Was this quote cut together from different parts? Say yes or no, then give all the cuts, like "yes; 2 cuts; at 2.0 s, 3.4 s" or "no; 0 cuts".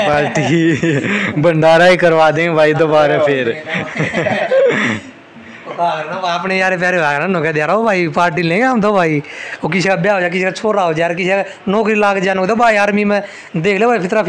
no; 0 cuts